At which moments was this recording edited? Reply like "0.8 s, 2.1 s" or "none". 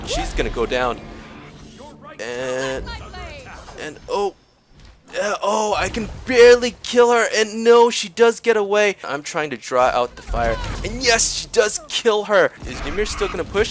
9.1 s, 12.7 s